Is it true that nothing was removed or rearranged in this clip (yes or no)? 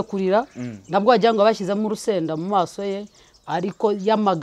yes